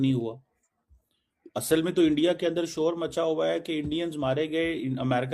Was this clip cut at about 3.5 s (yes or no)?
no